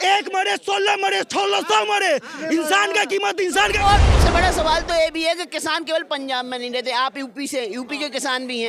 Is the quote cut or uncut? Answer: cut